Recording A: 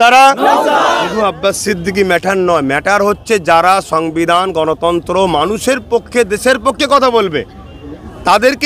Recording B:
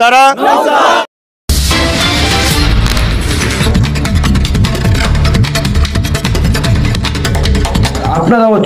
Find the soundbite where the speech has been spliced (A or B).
A